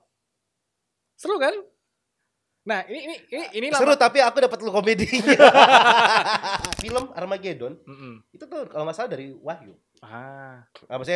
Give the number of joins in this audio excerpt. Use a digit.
1